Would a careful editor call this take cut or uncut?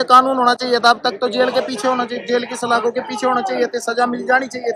uncut